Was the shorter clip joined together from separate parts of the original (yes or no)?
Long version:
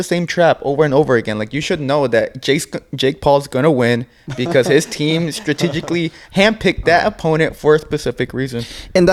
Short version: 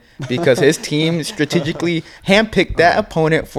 no